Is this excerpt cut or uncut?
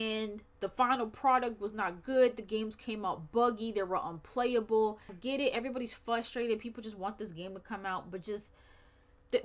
cut